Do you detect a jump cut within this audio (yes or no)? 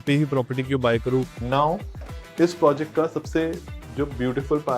yes